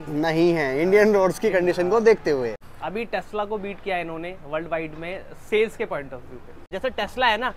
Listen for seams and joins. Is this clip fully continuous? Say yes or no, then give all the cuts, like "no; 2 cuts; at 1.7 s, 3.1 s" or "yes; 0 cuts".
no; 2 cuts; at 2.6 s, 6.6 s